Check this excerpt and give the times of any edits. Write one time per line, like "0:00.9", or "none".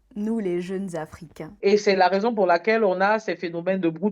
0:01.5